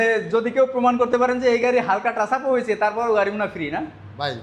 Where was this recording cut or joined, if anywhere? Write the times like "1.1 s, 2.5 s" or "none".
none